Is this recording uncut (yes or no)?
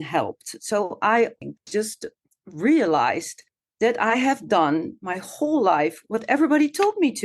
no